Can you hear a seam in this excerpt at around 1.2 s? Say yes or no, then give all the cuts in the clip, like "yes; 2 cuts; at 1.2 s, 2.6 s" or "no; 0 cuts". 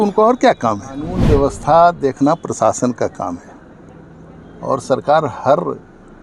yes; 1 cut; at 1.2 s